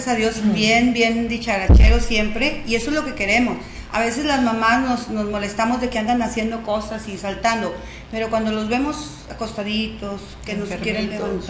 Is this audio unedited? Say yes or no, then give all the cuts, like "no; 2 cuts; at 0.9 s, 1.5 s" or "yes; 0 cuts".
no; 1 cut; at 6.1 s